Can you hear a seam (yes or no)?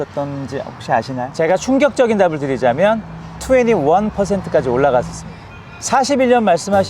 yes